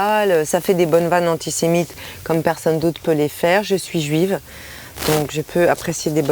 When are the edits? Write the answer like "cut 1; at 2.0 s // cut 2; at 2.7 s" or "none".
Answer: none

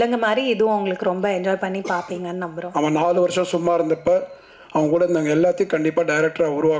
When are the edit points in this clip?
cut 1; at 2.6 s

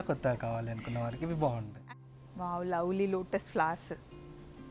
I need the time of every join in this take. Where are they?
cut 1; at 1.7 s

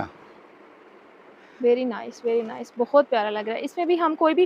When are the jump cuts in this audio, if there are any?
none

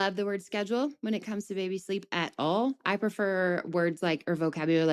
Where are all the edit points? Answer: none

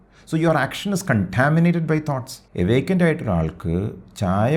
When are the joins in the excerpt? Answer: cut 1; at 2.4 s

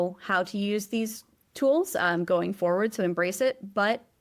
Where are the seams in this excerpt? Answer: none

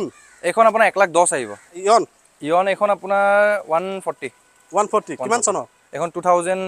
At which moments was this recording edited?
cut 1; at 1.8 s

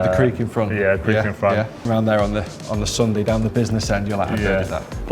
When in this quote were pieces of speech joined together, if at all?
cut 1; at 1.8 s

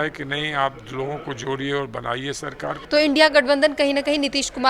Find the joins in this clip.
cut 1; at 2.7 s

